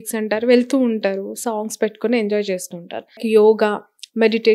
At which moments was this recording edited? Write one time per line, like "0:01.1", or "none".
0:03.2